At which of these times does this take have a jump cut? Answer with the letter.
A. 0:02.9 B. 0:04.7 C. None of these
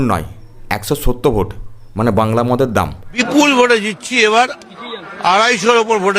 A